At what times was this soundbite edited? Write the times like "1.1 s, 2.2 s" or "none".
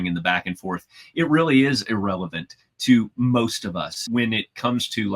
4.0 s